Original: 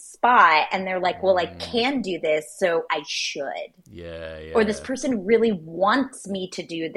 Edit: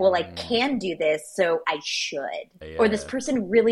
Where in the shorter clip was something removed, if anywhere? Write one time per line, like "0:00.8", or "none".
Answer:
0:02.6